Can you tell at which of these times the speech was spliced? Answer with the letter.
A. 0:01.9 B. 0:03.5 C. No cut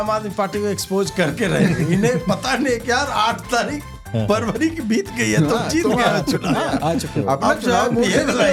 C